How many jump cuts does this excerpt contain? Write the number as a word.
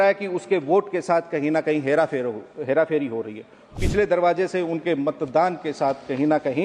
one